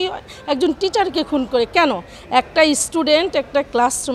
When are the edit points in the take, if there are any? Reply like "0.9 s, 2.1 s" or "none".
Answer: none